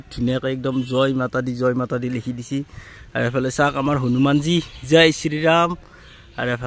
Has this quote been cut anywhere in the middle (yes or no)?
no